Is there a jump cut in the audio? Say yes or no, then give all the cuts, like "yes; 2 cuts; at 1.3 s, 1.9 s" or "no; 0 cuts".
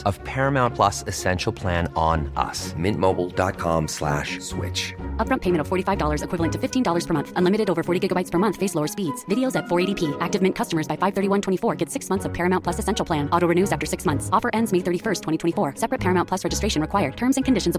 no; 0 cuts